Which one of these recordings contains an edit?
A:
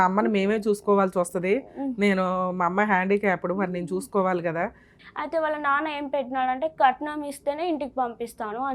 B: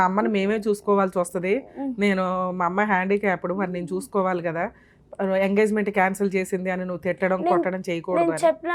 A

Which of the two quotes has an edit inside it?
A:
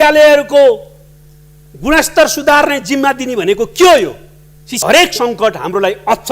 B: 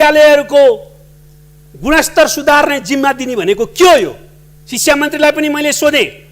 A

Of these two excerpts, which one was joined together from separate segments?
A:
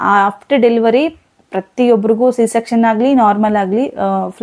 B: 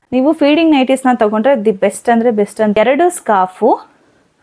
B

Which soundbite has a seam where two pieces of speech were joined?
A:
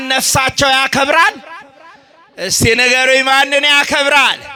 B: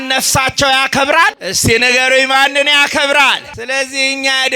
B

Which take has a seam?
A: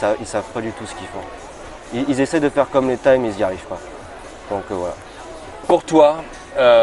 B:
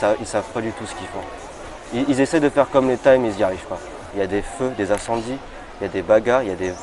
B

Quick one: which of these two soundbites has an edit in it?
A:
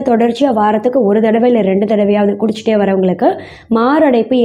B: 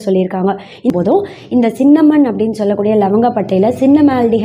B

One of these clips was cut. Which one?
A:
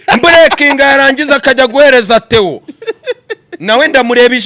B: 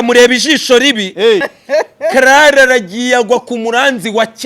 B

